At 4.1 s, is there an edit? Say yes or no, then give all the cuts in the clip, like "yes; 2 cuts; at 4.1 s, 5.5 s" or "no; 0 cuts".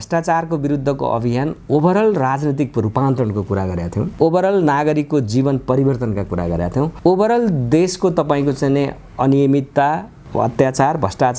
yes; 3 cuts; at 4.1 s, 6.9 s, 10.2 s